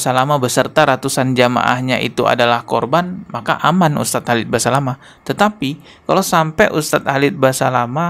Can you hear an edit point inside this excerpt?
no; 0 cuts

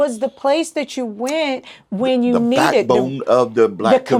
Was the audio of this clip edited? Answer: no; 0 cuts

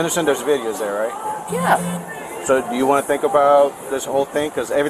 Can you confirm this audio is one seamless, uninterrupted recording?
yes; 0 cuts

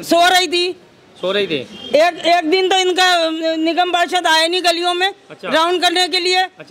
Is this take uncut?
yes; 0 cuts

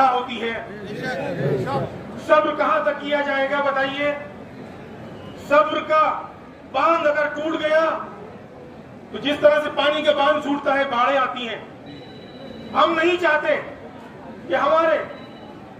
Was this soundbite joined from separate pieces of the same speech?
no; 0 cuts

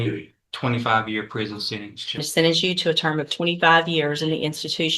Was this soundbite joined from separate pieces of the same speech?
yes; 1 cut; at 2.3 s

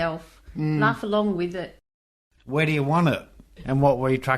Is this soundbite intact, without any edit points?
no; 1 cut; at 1.8 s

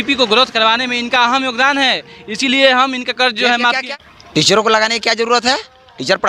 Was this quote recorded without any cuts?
no; 1 cut; at 3.8 s

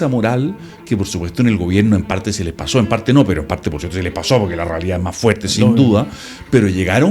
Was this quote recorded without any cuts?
yes; 0 cuts

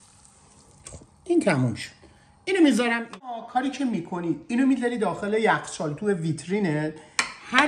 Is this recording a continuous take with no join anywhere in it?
no; 1 cut; at 3.3 s

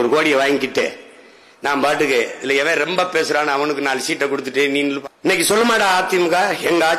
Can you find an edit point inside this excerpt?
yes; 1 cut; at 5.0 s

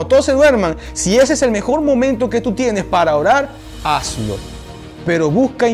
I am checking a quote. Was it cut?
no; 0 cuts

